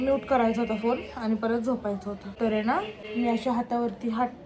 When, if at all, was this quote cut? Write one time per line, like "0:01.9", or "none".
0:02.3
0:03.0